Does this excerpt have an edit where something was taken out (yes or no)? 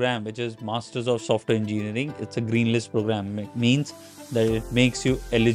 no